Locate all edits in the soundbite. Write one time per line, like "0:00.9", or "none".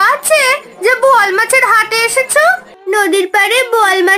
0:02.7